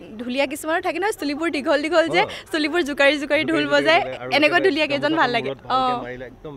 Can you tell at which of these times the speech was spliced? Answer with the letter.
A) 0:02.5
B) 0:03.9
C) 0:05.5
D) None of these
D